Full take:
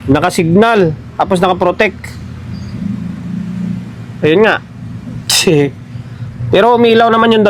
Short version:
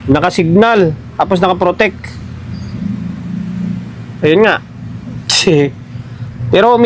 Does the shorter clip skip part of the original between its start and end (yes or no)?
no